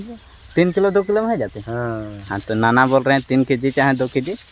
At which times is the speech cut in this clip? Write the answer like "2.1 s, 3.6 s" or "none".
none